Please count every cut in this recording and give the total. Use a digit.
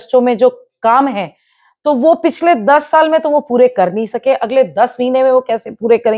0